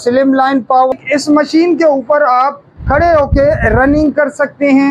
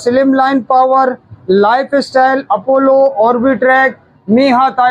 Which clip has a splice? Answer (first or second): first